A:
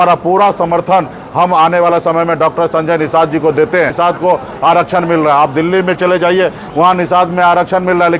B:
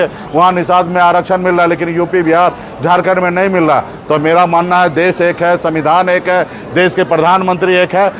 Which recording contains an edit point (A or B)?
A